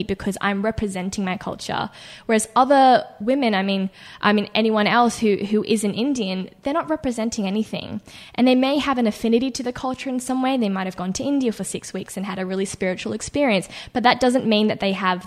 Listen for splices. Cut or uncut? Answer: uncut